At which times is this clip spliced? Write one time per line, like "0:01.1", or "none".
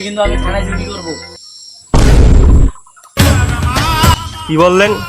none